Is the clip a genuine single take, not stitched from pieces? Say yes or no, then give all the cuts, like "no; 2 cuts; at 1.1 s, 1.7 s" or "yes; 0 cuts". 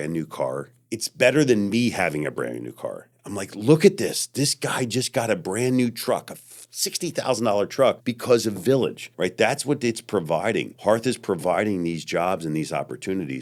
yes; 0 cuts